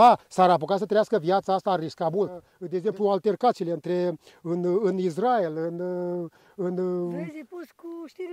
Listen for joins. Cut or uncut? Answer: cut